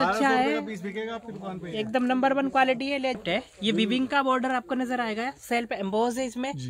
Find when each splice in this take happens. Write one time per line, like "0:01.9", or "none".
0:03.2